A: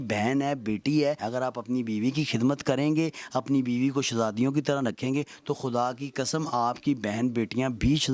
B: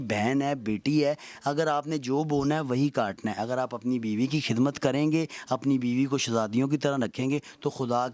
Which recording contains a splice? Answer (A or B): A